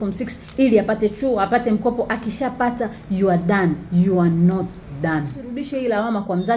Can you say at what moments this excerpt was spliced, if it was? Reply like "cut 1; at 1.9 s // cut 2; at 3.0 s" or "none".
cut 1; at 5.6 s